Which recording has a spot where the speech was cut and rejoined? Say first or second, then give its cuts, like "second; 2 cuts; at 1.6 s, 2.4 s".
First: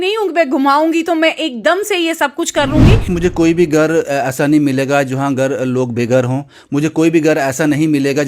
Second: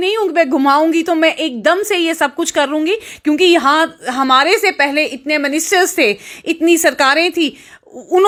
first; 1 cut; at 3.1 s